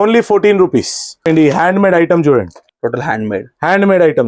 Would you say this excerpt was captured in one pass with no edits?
no; 2 cuts; at 1.3 s, 2.6 s

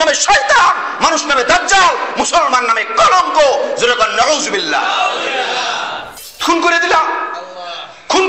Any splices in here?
yes; 1 cut; at 6.1 s

